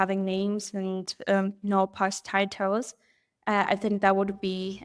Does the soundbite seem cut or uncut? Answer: uncut